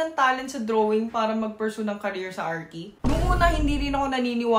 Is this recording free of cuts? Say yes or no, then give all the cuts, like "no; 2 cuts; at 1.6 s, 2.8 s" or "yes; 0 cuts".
yes; 0 cuts